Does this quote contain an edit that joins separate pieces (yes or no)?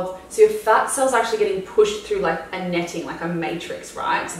no